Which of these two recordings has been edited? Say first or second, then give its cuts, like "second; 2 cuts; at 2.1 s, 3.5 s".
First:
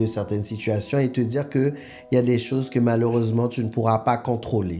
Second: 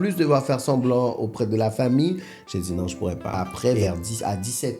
second; 1 cut; at 3.3 s